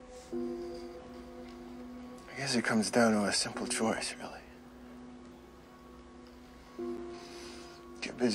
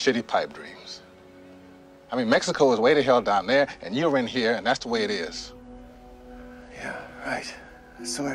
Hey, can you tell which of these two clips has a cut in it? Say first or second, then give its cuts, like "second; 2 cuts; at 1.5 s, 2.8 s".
second; 1 cut; at 1.4 s